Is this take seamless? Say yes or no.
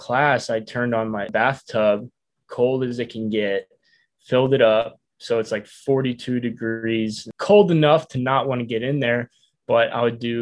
no